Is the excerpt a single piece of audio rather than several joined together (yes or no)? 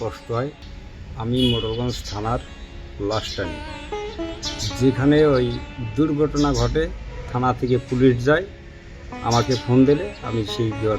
no